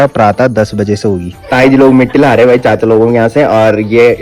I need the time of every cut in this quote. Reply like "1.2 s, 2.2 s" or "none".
1.4 s